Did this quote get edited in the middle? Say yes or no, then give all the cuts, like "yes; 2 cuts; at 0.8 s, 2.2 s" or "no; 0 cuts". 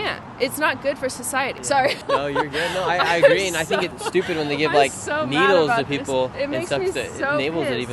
no; 0 cuts